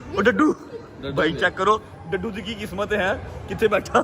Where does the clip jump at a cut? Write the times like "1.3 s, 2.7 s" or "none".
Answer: none